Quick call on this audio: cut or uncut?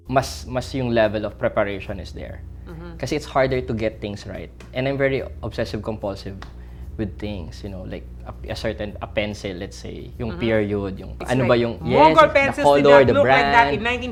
uncut